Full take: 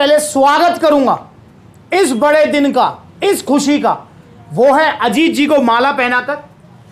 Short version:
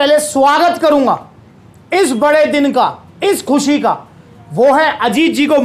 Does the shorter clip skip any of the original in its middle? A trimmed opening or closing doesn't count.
no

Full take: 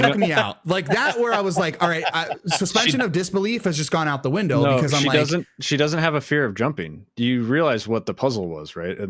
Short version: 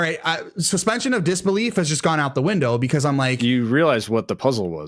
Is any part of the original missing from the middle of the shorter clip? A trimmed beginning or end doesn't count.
yes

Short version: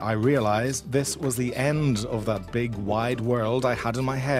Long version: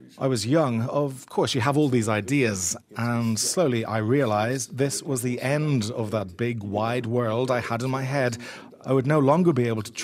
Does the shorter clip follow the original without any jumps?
yes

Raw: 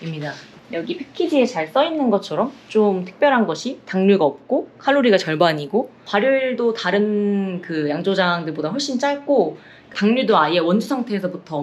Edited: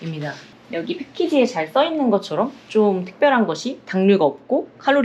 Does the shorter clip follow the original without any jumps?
yes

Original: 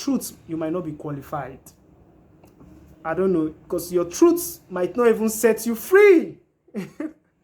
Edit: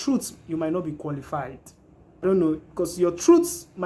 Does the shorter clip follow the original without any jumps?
no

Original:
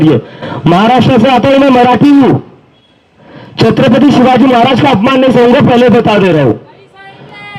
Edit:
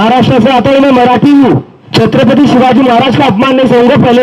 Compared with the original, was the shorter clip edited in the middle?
yes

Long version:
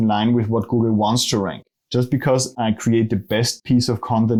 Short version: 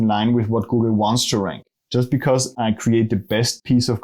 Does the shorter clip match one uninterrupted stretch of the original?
yes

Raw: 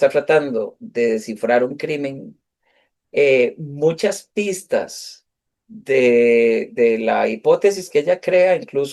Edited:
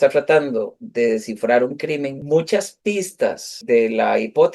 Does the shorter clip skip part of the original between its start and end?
yes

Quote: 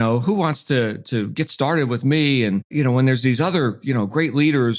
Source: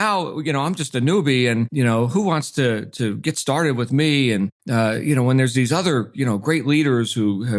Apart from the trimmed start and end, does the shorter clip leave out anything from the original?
yes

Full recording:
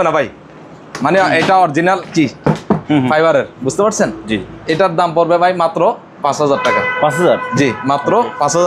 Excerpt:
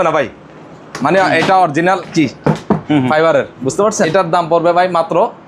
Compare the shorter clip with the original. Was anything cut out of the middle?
yes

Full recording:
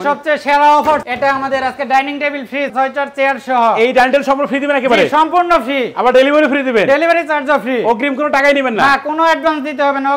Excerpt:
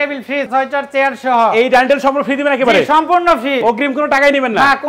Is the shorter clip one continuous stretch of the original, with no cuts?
no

